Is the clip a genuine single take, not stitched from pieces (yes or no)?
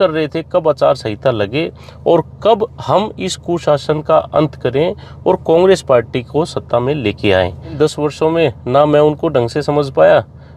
no